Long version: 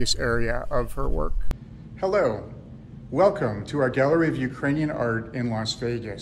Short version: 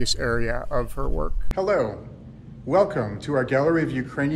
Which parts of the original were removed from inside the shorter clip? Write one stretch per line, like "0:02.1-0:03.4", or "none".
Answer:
0:01.4-0:01.9